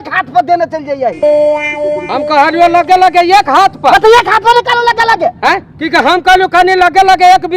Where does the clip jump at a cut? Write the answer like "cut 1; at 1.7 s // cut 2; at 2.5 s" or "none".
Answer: cut 1; at 1.2 s // cut 2; at 2.1 s